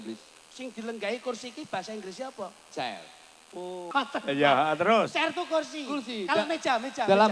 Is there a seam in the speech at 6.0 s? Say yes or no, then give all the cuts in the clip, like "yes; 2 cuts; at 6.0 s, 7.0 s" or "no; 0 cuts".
no; 1 cut; at 3.9 s